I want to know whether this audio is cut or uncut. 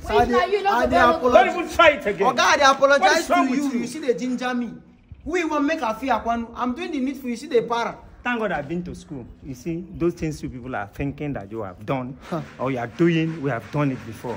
uncut